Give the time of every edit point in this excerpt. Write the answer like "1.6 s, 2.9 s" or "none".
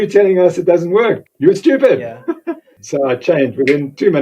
1.3 s, 2.7 s